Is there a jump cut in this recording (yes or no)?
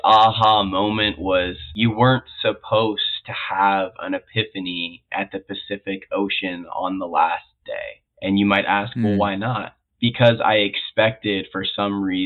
yes